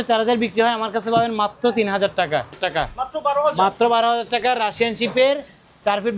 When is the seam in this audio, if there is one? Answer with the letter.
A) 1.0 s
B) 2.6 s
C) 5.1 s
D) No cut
B